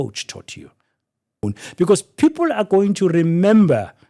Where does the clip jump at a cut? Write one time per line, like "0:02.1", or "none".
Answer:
0:01.4